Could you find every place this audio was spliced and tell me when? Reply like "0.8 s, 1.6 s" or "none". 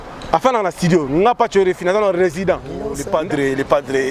3.0 s